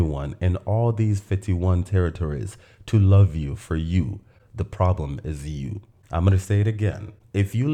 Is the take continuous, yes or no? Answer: yes